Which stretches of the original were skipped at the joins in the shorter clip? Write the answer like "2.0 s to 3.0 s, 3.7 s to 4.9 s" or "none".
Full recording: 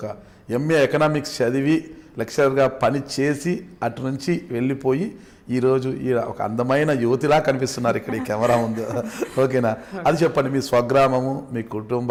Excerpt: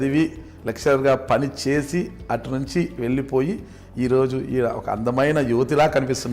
none